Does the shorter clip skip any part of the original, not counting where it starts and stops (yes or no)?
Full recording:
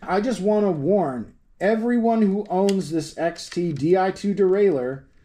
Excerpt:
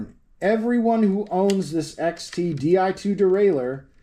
no